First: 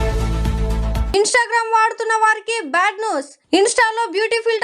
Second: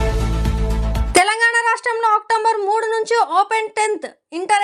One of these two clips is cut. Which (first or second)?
first